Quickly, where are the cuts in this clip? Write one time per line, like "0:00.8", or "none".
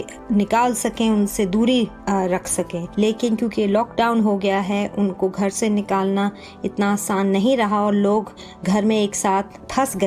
0:02.8